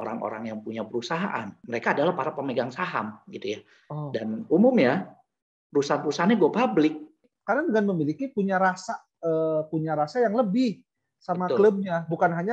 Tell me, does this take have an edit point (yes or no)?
yes